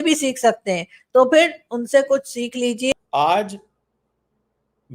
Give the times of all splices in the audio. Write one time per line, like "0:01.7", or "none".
0:02.9

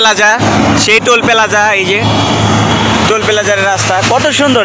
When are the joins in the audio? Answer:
none

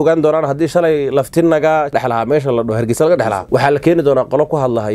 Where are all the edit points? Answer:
0:01.9
0:03.4

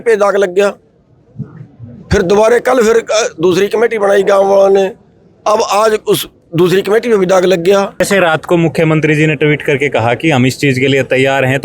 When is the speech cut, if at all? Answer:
0:08.0

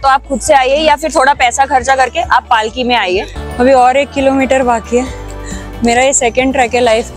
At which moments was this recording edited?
0:03.4

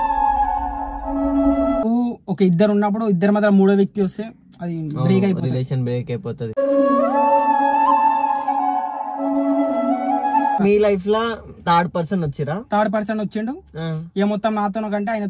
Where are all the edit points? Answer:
0:01.8
0:10.6

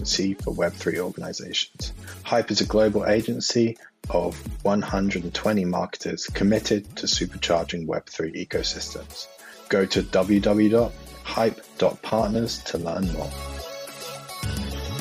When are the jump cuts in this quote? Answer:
0:13.3

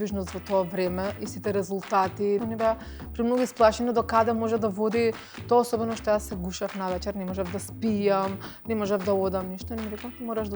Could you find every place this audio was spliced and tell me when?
0:02.4

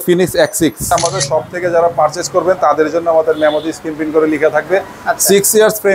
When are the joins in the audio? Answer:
0:00.9

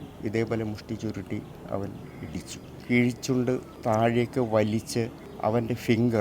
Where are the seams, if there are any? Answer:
0:02.7
0:03.7
0:05.2

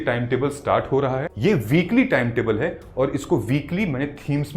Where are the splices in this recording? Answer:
0:01.3

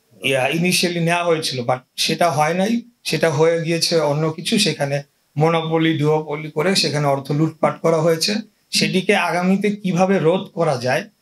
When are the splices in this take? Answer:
none

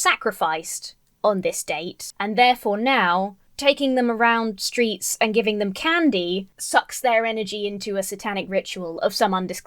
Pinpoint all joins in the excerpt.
0:02.0

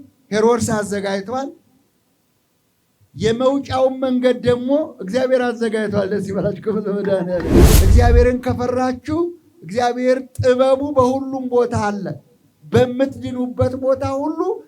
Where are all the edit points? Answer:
0:07.7

